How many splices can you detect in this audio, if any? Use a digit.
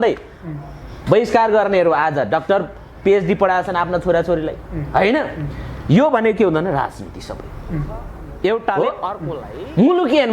1